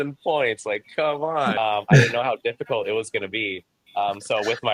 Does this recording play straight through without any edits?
yes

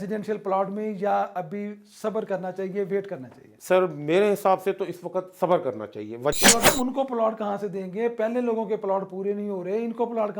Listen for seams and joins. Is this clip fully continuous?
no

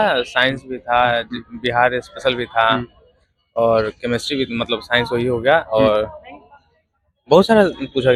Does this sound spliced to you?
no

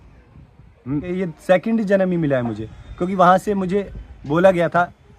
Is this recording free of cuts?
no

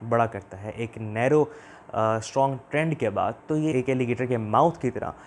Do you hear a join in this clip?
yes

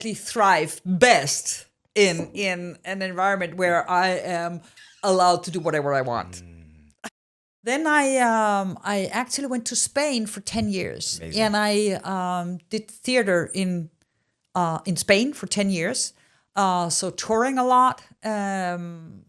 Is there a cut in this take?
yes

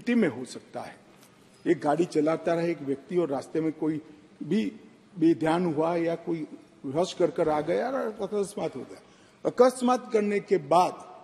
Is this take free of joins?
yes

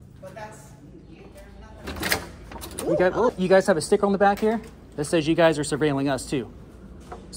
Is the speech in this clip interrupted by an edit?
yes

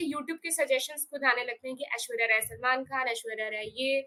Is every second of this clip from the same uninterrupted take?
yes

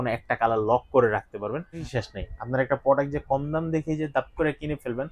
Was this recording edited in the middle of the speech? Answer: yes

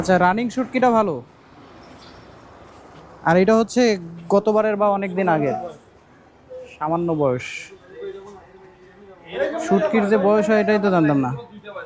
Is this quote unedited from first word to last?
yes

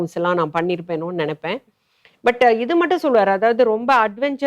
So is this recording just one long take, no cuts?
yes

